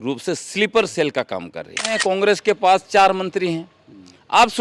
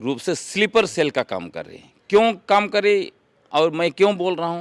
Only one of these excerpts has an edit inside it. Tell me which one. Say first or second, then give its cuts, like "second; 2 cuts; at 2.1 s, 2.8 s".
first; 1 cut; at 2.0 s